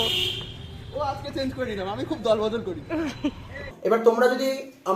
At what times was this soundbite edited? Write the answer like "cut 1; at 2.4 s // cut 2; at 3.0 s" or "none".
cut 1; at 3.7 s